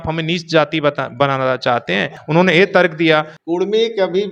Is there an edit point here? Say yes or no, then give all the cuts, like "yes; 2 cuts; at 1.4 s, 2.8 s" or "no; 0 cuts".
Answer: yes; 2 cuts; at 2.1 s, 3.4 s